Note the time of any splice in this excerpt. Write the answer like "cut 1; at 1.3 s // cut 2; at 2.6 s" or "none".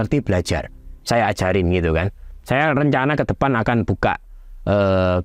none